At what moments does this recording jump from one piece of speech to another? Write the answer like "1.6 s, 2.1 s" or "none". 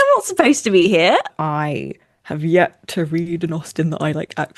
1.3 s